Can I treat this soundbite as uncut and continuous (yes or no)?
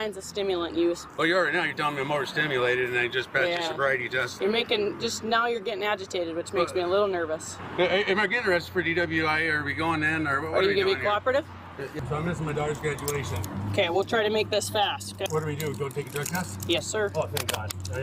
no